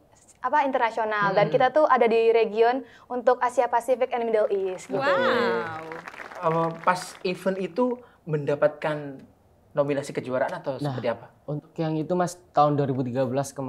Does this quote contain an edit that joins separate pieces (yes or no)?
no